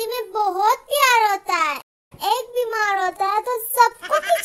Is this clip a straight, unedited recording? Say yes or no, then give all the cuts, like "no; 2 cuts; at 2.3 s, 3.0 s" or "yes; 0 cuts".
yes; 0 cuts